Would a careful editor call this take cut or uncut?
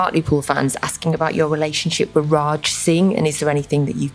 uncut